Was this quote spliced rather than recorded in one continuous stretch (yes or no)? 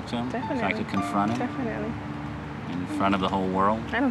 no